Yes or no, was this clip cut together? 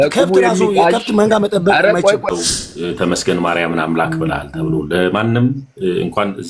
yes